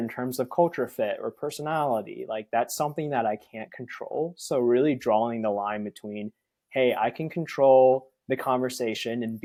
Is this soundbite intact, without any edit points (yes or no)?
yes